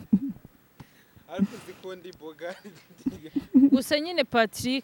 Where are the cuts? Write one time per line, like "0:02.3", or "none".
none